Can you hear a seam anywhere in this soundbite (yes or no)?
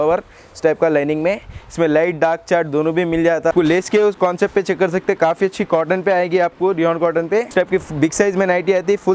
yes